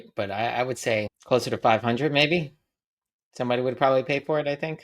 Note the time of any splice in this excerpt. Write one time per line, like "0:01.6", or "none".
0:01.1